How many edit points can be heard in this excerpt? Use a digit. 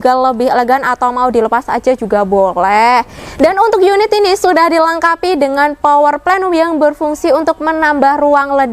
1